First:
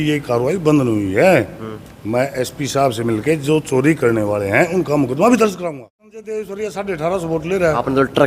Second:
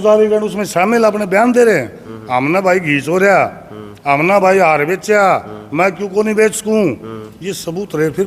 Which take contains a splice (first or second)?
first